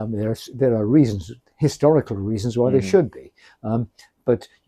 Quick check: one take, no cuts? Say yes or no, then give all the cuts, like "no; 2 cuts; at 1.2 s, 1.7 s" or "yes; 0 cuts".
yes; 0 cuts